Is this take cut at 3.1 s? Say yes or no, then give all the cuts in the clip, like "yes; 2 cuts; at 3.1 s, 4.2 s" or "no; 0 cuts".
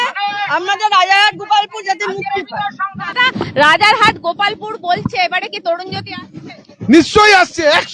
yes; 1 cut; at 3.1 s